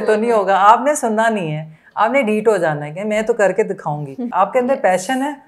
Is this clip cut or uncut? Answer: cut